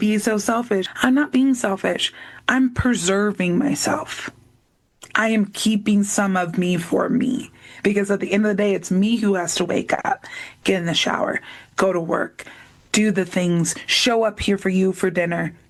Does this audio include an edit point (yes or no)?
no